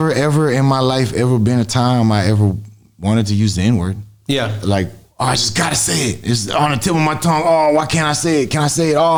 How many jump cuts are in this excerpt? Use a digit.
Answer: 0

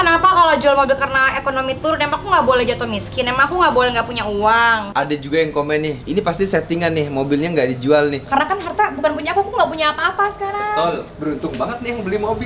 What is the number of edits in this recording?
2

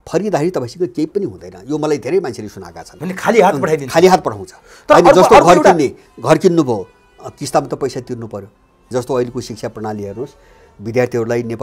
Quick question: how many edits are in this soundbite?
1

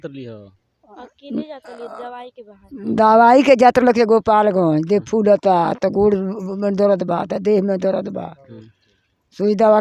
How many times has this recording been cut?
0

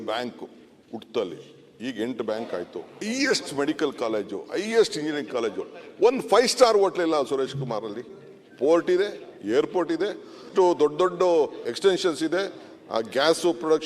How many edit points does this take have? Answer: 3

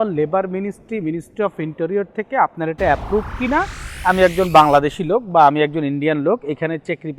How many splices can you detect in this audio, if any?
1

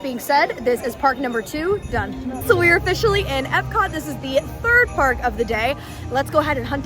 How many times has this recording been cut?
1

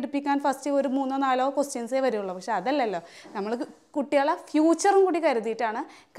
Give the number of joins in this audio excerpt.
0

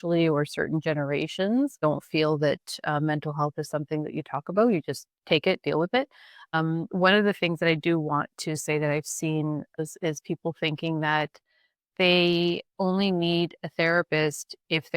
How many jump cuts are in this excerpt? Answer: 5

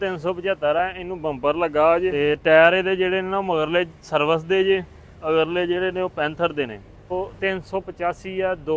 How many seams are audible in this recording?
2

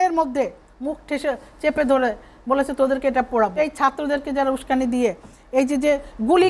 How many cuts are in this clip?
1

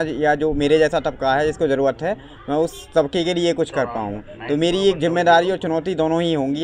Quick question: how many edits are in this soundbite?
0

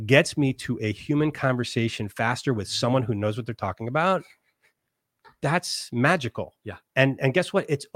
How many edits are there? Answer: 0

